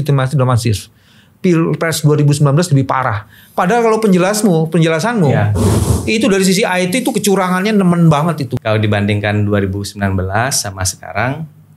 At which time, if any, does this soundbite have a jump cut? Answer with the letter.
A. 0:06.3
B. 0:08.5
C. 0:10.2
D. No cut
B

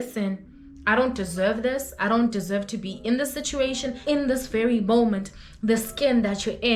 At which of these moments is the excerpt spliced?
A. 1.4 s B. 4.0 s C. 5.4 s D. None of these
B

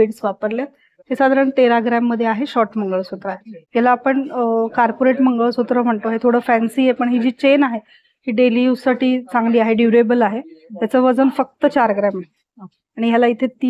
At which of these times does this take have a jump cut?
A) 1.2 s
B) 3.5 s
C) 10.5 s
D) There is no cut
D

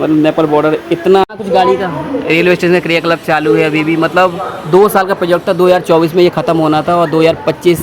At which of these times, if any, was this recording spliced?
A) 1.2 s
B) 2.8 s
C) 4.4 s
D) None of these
A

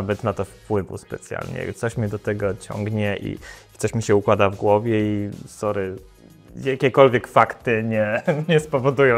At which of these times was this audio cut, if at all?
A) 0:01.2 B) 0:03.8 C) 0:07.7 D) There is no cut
D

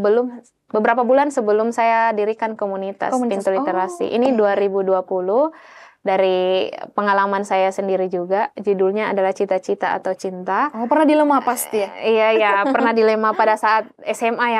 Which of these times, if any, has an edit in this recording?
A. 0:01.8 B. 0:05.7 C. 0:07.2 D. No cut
D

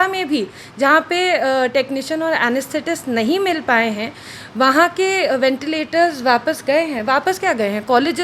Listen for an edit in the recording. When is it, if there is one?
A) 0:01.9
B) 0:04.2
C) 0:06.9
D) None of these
D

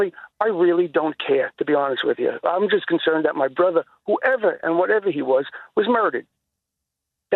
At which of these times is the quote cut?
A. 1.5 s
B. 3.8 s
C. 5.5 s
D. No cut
D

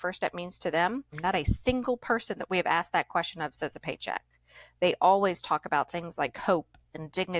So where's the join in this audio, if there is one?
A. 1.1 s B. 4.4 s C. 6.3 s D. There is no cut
A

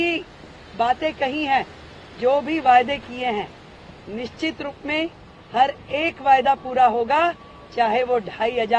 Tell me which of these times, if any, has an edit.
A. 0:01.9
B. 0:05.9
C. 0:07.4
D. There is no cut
D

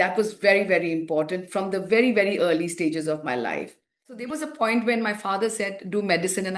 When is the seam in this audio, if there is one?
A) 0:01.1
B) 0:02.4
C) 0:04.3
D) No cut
C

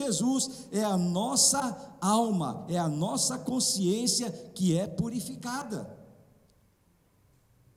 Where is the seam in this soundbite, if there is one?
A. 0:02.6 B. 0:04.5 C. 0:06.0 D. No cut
D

